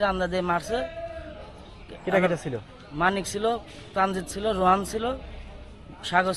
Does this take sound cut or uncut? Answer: uncut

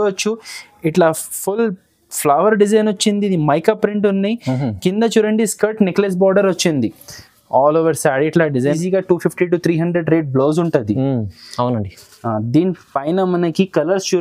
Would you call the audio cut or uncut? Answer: cut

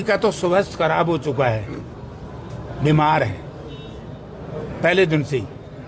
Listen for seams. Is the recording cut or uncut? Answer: uncut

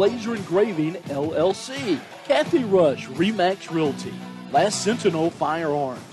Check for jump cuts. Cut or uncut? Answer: cut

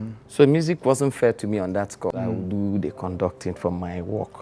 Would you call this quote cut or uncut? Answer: cut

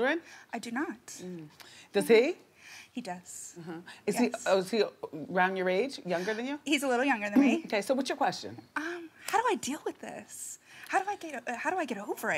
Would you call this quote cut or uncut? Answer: cut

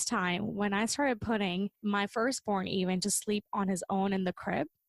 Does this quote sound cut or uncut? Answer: cut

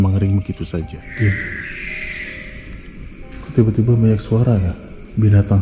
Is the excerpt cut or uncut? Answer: cut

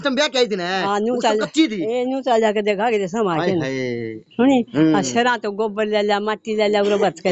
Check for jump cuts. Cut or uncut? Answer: uncut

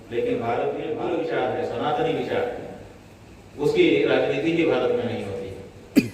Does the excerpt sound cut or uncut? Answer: cut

